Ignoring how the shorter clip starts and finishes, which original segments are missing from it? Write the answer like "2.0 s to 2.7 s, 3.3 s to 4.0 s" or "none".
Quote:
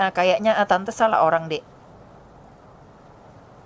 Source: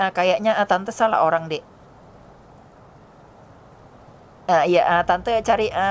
1.6 s to 1.8 s